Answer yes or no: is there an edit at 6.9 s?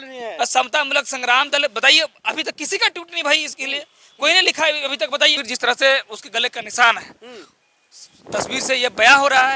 no